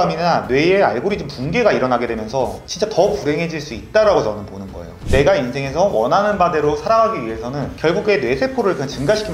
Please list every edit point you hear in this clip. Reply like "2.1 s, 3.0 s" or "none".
5.0 s